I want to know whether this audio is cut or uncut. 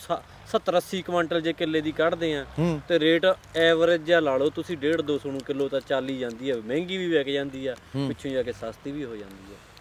uncut